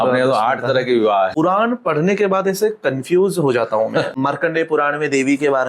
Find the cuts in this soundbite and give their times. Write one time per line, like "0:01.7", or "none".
0:01.3
0:04.1